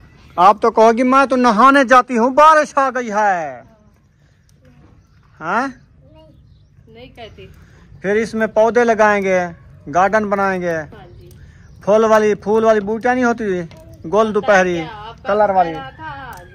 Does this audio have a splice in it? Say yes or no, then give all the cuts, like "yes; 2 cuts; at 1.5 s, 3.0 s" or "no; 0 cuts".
no; 0 cuts